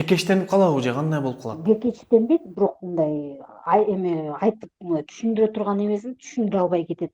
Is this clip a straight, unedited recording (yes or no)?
no